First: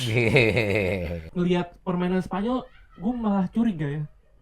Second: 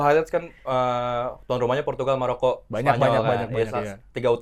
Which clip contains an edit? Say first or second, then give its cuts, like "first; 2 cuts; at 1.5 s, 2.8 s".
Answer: first; 1 cut; at 1.2 s